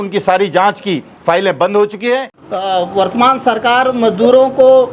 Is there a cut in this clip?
yes; 1 cut; at 2.4 s

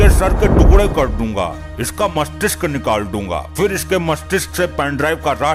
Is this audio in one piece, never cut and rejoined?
yes; 0 cuts

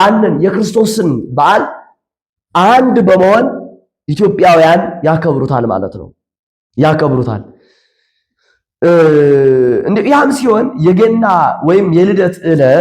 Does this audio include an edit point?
no; 0 cuts

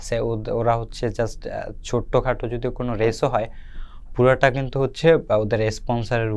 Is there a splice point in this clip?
no; 0 cuts

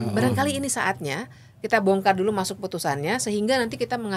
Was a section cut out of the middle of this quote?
no; 0 cuts

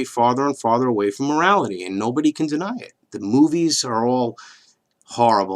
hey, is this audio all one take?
no; 1 cut; at 1.5 s

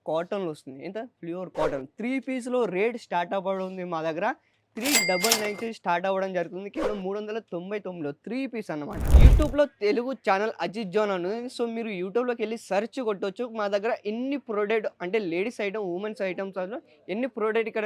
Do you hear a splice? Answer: yes; 1 cut; at 9.0 s

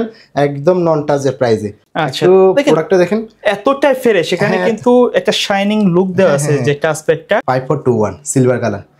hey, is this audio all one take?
no; 2 cuts; at 1.8 s, 7.4 s

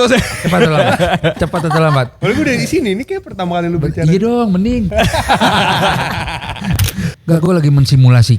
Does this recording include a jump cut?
yes; 1 cut; at 6.9 s

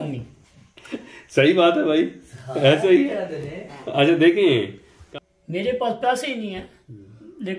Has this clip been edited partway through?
yes; 1 cut; at 4.9 s

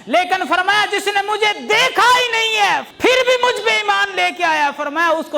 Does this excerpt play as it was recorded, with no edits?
yes; 0 cuts

